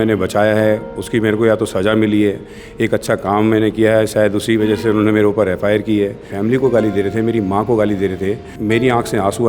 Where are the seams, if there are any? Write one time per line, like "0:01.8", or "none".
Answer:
0:06.3
0:08.5